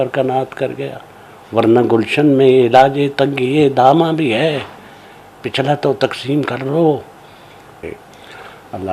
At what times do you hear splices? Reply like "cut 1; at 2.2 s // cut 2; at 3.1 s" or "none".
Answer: cut 1; at 7.8 s